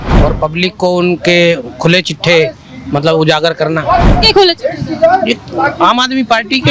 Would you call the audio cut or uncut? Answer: cut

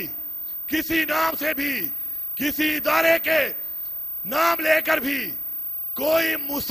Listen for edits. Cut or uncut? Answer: uncut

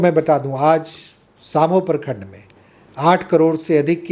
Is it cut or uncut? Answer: uncut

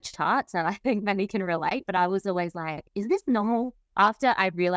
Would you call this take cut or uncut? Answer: cut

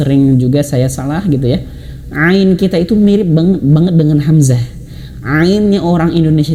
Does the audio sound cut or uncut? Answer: uncut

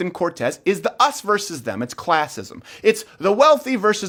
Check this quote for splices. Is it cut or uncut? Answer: uncut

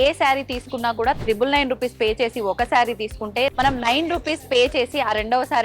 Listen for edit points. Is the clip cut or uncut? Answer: cut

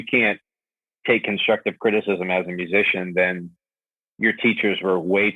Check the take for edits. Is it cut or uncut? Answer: uncut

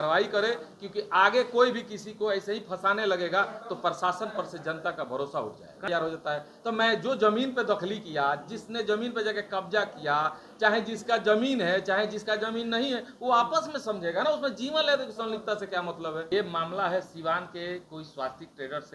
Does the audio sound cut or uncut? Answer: cut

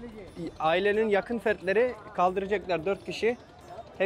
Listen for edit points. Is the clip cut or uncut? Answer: uncut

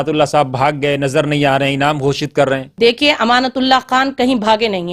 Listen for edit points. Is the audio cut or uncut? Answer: uncut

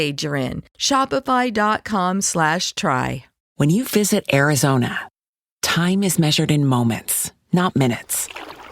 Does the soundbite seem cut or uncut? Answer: cut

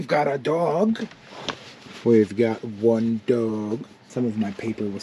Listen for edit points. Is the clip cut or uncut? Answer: cut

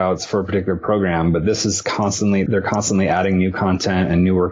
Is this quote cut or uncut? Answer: cut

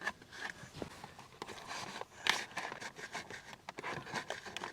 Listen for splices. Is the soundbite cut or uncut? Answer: cut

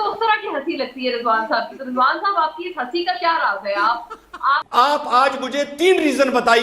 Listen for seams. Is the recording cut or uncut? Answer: cut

